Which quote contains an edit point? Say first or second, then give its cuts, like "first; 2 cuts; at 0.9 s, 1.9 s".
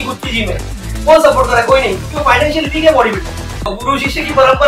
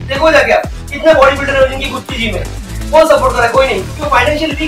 first; 1 cut; at 3.8 s